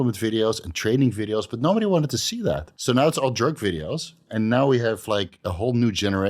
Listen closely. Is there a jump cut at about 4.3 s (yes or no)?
yes